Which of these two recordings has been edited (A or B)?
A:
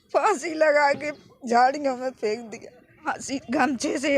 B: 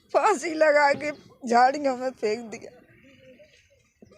A